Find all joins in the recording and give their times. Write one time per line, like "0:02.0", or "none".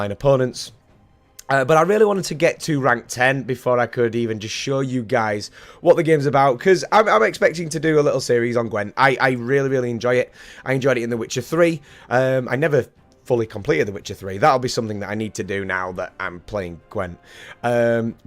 none